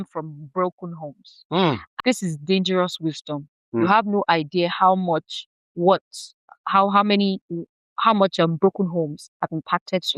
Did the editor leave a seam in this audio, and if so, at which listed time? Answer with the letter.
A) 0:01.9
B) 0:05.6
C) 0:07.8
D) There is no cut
A